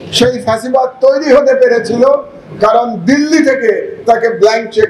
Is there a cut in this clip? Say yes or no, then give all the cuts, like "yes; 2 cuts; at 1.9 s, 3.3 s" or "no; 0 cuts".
no; 0 cuts